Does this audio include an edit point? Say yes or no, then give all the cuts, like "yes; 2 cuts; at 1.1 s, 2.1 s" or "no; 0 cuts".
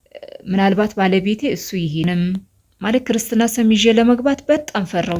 yes; 1 cut; at 2.1 s